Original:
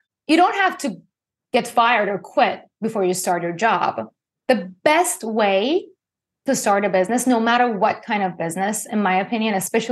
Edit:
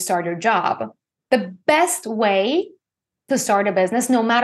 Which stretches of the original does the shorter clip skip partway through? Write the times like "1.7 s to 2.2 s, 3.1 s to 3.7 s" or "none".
none

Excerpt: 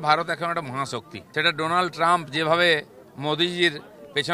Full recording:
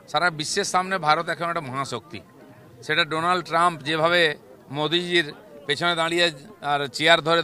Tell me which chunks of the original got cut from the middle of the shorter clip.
2.2 s to 2.7 s

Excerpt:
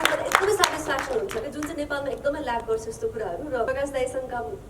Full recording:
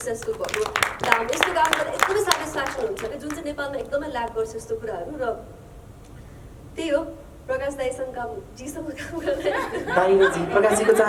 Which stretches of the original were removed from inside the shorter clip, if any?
5.4 s to 7.5 s

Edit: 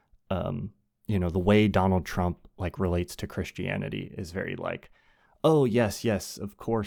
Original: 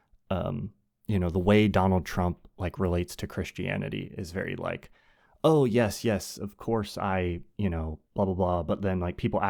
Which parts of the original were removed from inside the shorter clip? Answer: none

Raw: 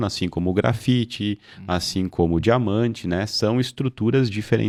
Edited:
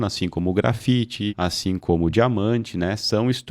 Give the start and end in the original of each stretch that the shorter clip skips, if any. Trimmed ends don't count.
1.3 s to 1.6 s

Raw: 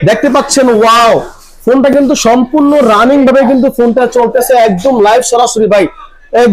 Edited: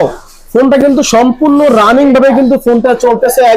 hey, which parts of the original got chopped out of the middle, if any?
none

